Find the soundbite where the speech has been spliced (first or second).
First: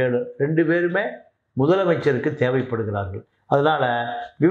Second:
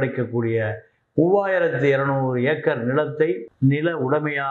second